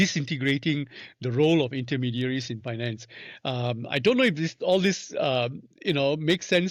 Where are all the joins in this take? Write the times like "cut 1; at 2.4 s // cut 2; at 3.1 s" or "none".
none